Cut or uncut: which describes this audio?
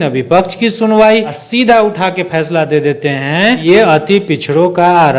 cut